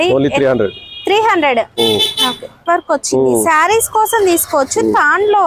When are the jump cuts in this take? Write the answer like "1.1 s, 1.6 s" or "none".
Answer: 2.6 s